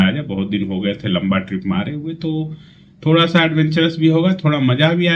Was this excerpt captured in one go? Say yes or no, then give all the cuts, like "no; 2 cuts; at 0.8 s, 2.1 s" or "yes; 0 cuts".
yes; 0 cuts